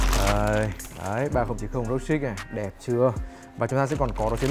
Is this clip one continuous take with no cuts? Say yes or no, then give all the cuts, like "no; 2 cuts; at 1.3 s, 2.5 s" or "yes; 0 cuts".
yes; 0 cuts